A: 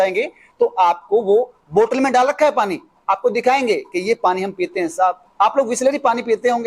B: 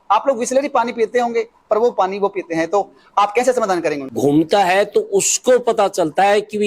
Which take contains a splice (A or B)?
B